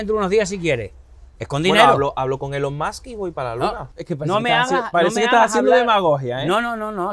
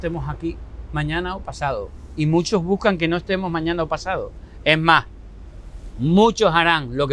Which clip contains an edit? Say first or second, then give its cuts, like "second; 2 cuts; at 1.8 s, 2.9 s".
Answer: first; 1 cut; at 3.9 s